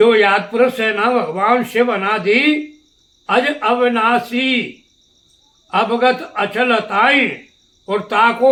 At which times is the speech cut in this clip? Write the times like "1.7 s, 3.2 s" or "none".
none